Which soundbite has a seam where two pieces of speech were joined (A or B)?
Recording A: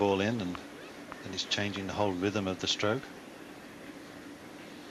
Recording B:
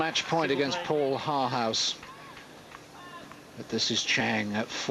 A